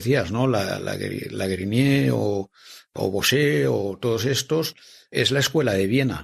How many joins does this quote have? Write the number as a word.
one